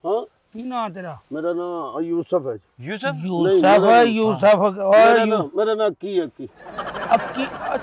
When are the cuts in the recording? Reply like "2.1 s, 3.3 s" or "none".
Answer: none

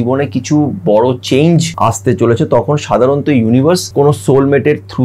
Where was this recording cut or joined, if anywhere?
1.7 s, 3.9 s

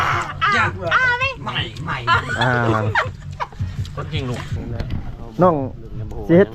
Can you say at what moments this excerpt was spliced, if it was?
4.6 s

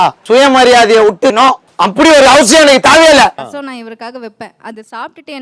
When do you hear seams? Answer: 3.3 s

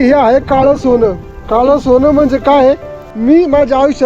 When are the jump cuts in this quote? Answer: 3.0 s

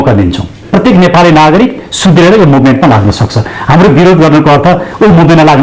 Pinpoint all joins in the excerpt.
none

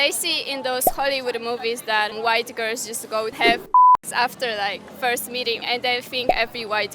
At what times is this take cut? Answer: 3.4 s, 5.6 s

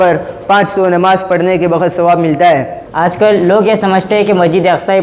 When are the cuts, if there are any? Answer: 2.8 s

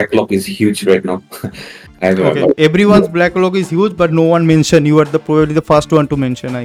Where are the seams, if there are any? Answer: none

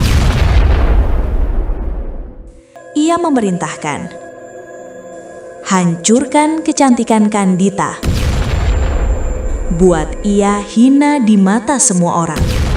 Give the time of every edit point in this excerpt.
2.8 s

